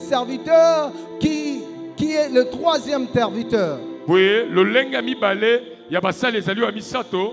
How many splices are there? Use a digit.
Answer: 0